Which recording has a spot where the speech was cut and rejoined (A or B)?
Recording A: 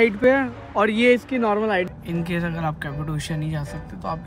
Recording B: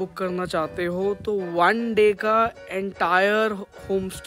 A